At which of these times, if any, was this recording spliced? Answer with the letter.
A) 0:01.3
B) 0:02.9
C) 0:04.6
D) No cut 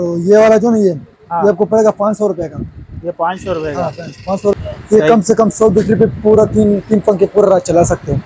C